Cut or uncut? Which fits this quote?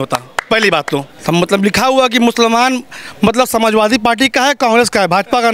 cut